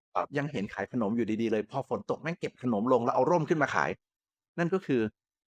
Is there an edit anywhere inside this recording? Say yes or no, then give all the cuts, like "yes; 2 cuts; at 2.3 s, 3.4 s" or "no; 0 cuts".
yes; 1 cut; at 4.4 s